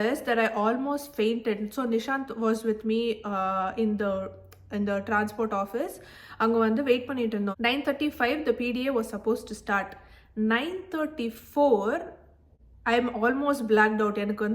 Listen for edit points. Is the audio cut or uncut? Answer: uncut